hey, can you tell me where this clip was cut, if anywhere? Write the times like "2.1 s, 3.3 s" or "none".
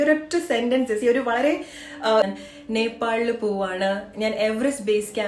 2.2 s